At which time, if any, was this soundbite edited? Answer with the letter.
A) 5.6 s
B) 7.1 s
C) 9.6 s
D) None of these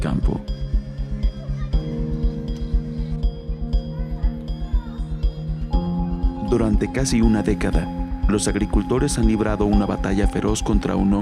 B